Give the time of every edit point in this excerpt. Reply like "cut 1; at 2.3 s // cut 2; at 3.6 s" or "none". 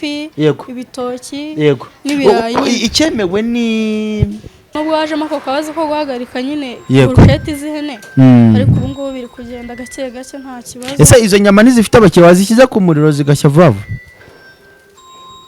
cut 1; at 4.6 s